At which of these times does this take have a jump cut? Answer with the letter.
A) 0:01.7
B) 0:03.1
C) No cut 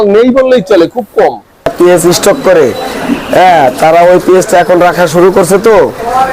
A